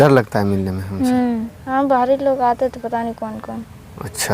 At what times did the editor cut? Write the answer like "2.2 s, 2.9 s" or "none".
1.5 s